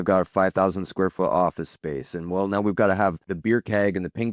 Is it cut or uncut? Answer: cut